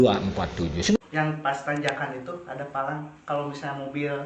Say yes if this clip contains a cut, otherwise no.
yes